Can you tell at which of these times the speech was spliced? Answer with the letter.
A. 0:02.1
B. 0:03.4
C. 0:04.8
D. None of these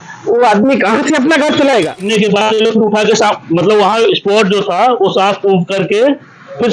A